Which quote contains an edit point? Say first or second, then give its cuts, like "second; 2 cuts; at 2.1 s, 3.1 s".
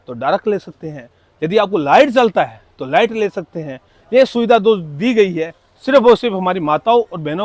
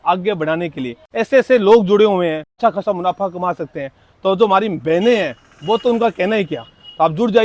second; 2 cuts; at 1.0 s, 2.5 s